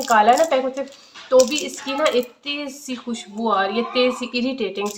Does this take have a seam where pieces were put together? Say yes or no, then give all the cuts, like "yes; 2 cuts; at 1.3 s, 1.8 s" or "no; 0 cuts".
no; 0 cuts